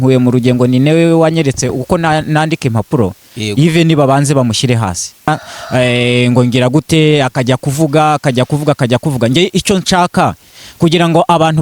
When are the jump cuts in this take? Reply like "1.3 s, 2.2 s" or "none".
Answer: 5.3 s